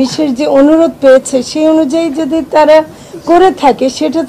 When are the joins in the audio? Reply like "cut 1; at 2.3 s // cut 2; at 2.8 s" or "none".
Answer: none

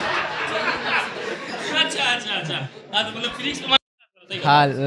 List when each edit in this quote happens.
none

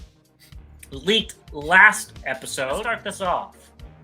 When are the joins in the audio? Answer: cut 1; at 2.9 s

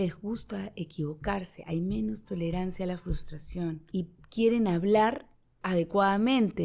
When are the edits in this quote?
cut 1; at 3.8 s

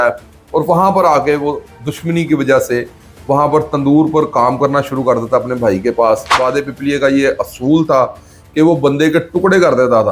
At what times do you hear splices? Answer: cut 1; at 6.3 s

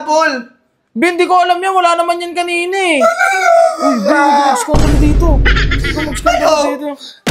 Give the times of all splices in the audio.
none

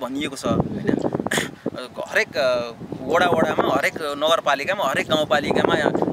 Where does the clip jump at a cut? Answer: none

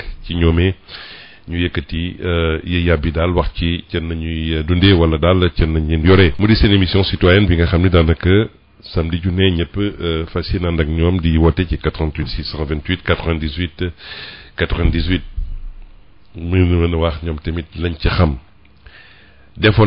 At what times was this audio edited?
cut 1; at 6.3 s

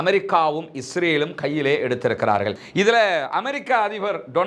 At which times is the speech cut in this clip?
cut 1; at 2.6 s

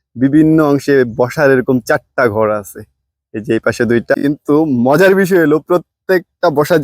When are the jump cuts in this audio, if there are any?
cut 1; at 4.2 s

